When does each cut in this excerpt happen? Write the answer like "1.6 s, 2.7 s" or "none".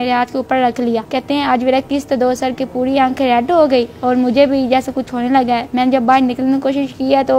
1.1 s, 5.7 s